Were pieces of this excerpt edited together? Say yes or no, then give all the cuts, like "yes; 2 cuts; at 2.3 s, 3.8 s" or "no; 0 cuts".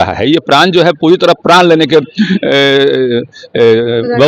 no; 0 cuts